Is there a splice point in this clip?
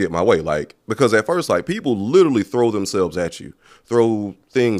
no; 0 cuts

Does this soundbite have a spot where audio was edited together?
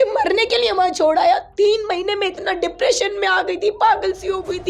no; 0 cuts

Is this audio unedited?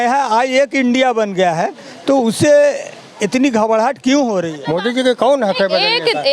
no; 1 cut; at 4.6 s

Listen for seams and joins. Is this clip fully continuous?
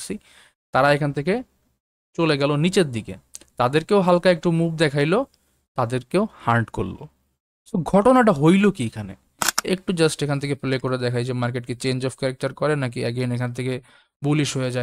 no; 1 cut; at 9.5 s

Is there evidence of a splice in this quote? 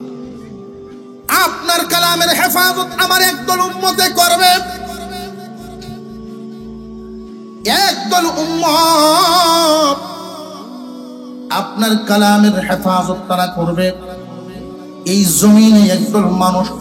yes; 1 cut; at 1.0 s

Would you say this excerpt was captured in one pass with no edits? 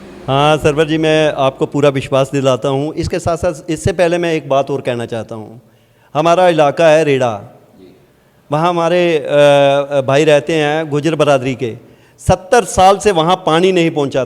yes; 0 cuts

